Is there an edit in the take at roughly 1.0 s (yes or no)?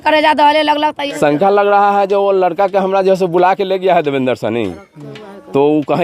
yes